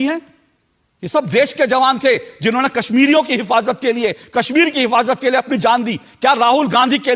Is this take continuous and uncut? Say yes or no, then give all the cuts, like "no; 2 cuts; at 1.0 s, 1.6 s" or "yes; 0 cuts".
yes; 0 cuts